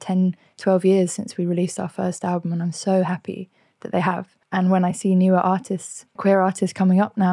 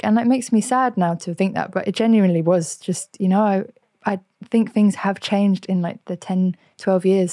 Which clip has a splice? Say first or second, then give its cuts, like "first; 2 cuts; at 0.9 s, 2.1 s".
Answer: first; 2 cuts; at 4.3 s, 6.2 s